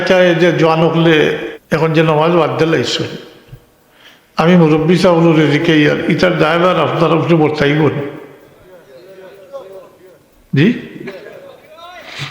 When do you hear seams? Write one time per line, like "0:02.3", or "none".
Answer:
0:01.5